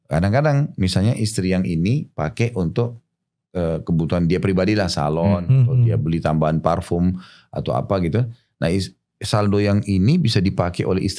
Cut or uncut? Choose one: uncut